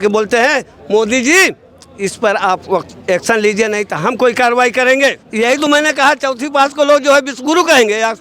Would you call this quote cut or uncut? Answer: cut